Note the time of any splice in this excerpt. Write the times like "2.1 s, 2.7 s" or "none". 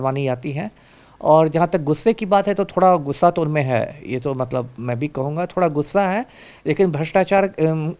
none